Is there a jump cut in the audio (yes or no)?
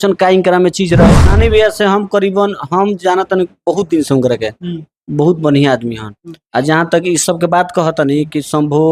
yes